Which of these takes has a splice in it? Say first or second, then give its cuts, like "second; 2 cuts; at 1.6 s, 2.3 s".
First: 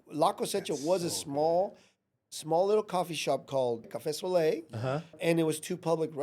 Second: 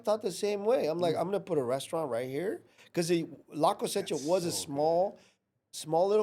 first; 2 cuts; at 3.9 s, 5.2 s